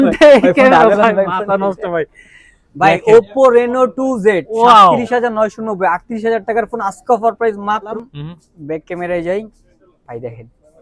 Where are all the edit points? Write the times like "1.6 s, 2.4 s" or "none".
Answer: 7.9 s